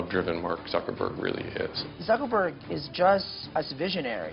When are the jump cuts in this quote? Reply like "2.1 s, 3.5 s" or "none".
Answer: 1.8 s, 3.4 s